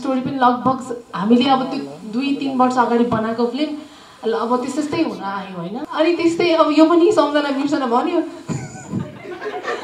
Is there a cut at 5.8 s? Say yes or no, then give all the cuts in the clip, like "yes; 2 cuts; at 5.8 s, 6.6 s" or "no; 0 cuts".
yes; 1 cut; at 5.8 s